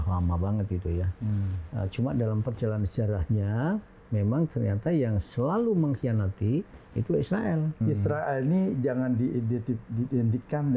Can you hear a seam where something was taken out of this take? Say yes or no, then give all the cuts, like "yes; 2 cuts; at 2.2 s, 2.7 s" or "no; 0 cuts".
yes; 1 cut; at 7.8 s